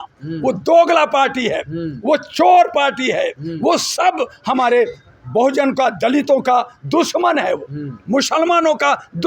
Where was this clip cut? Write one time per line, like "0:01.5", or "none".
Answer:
none